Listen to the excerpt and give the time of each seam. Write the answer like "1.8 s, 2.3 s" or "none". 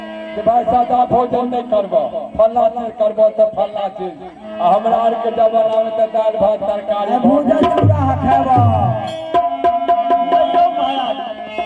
none

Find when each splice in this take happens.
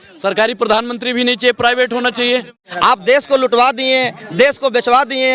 2.6 s

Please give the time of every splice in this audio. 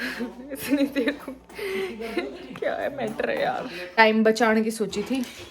4.0 s

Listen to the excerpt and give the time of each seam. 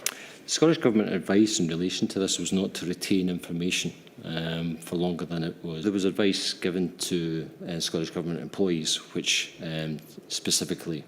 5.8 s

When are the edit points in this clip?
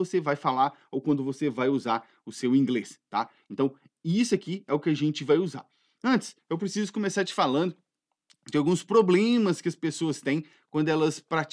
none

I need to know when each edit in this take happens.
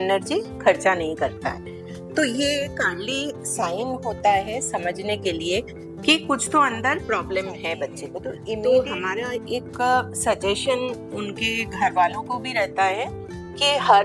8.4 s

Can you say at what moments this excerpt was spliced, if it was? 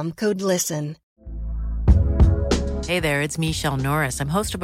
1.1 s

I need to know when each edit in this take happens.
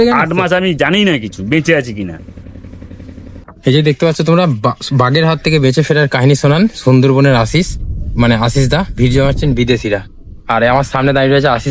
3.5 s

